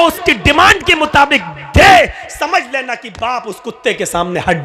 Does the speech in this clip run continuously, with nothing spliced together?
yes; 0 cuts

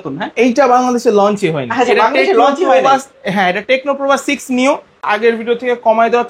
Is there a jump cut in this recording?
yes; 1 cut; at 5.1 s

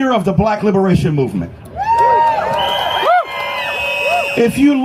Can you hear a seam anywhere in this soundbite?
no; 0 cuts

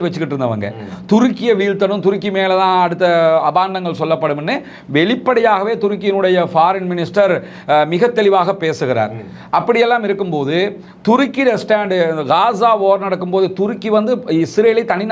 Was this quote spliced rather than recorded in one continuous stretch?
no; 0 cuts

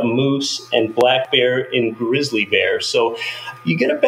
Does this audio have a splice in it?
no; 0 cuts

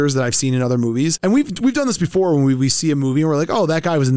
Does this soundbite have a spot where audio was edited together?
no; 0 cuts

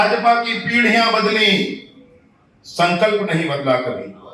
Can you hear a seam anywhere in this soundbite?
no; 0 cuts

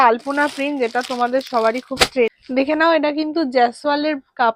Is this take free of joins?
no; 1 cut; at 2.4 s

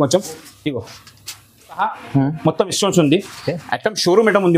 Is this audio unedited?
no; 1 cut; at 1.8 s

